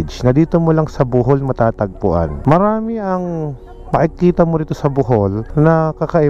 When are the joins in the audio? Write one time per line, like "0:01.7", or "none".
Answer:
none